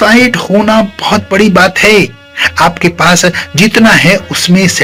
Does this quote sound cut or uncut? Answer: uncut